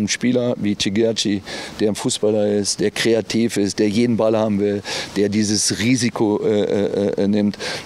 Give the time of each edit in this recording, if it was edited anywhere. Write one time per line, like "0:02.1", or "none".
none